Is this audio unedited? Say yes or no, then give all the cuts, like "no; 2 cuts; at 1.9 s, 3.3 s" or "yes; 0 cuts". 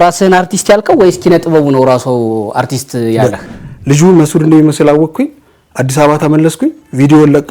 no; 1 cut; at 3.5 s